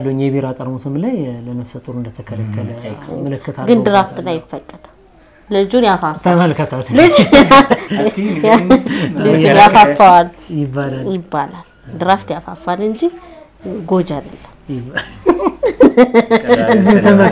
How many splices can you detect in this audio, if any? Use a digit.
0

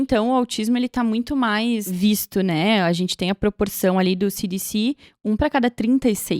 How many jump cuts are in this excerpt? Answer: 1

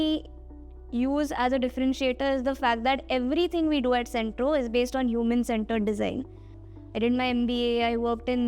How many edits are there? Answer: 1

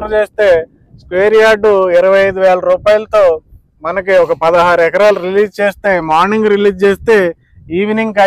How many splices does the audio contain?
0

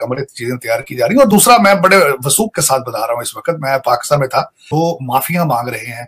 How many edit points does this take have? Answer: 1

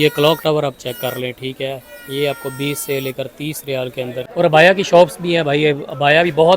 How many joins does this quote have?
1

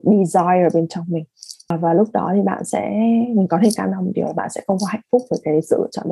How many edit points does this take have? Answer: 1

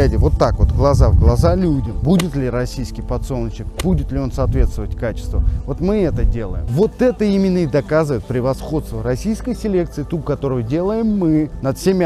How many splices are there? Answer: 1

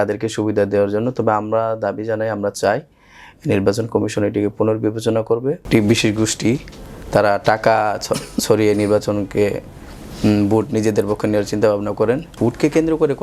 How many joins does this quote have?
2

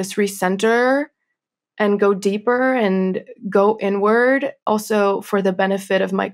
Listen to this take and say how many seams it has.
1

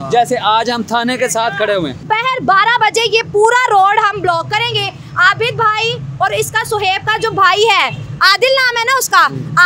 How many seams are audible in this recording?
1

